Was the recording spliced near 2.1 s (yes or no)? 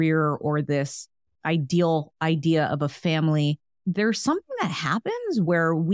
no